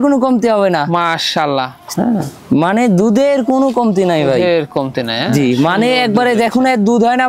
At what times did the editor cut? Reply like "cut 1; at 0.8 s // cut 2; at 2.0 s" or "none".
cut 1; at 1.8 s